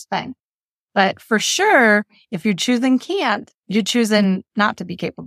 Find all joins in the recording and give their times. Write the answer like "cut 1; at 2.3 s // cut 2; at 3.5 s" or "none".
cut 1; at 3.5 s